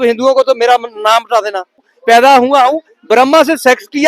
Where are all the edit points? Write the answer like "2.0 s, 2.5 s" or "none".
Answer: 1.9 s